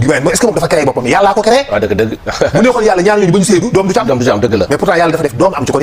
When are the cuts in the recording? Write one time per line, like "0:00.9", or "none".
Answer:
none